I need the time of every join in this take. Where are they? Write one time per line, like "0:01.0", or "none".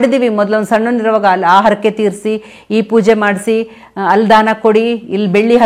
none